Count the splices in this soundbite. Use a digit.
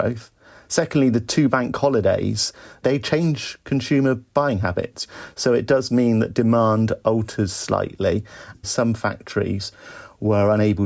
2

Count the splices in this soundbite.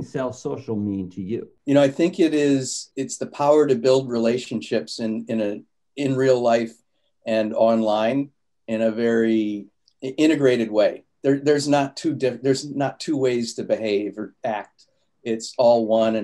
2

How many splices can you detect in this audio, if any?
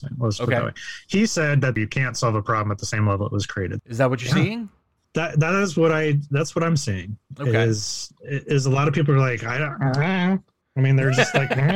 2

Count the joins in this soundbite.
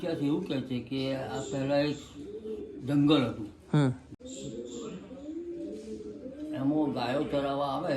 1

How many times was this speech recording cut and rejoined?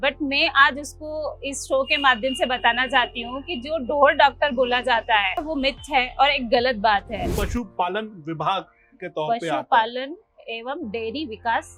2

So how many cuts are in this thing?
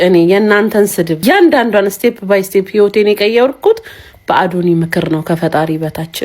1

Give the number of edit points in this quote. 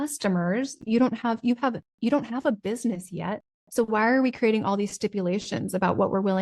1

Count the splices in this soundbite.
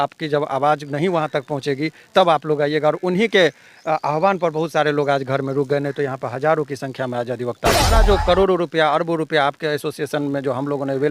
1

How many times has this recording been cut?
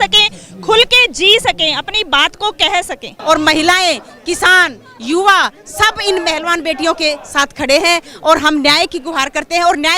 1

